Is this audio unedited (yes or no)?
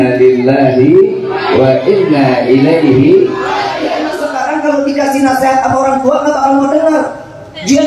no